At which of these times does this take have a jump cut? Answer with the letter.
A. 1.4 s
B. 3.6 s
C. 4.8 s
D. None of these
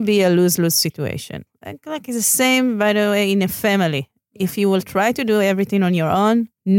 A